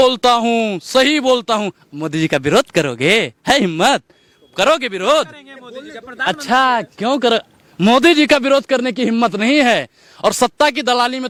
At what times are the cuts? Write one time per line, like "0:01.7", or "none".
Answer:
none